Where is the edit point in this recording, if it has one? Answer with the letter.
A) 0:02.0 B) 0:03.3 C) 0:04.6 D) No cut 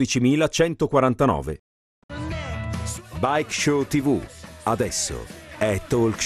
A